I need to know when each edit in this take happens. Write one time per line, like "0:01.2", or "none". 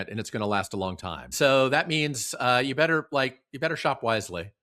0:01.3